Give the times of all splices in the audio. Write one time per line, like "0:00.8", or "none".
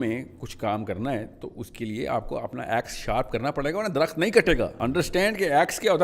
0:04.7